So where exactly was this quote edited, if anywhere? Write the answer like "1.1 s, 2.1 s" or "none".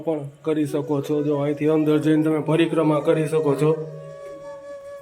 3.9 s